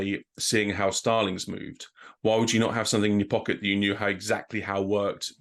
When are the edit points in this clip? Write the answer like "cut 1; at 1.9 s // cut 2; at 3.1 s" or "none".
none